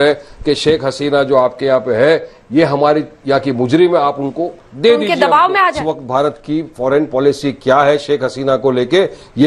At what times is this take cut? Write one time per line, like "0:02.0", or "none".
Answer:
0:05.8